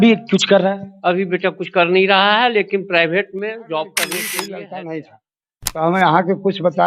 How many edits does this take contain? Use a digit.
1